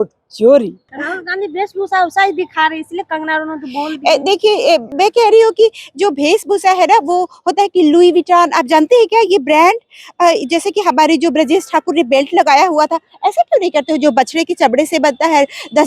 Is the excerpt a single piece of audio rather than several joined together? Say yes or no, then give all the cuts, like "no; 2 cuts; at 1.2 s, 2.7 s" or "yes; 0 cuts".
no; 2 cuts; at 1.0 s, 4.9 s